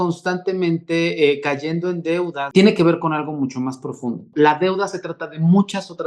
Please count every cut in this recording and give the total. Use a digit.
2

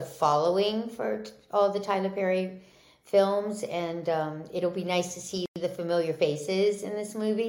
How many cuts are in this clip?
0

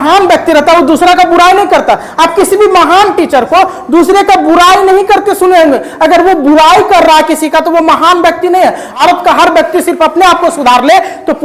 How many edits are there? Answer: 1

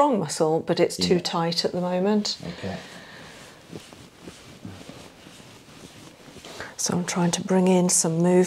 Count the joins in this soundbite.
1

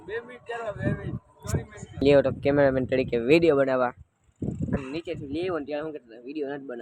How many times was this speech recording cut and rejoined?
1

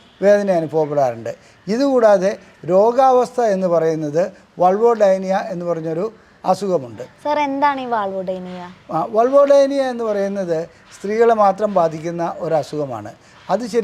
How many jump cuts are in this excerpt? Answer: 0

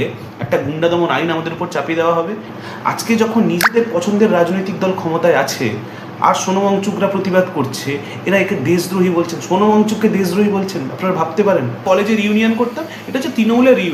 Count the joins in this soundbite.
2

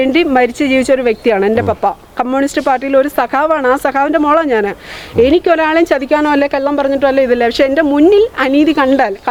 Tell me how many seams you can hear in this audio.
0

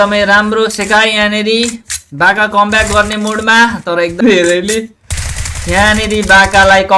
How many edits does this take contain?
1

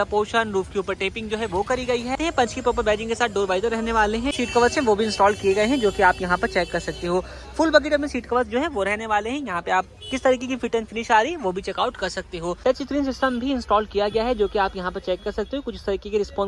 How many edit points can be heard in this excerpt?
3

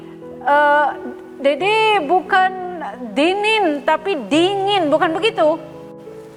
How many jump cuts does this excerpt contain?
0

